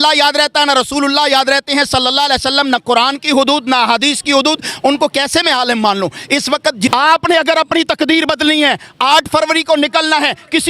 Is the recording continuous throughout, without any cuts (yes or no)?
no